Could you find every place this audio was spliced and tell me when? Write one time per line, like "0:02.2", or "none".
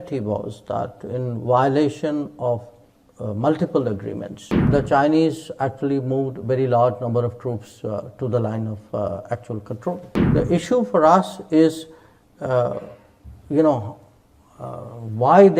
0:04.6
0:10.1